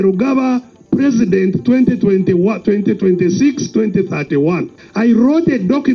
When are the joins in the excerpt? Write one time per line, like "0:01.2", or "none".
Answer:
0:04.8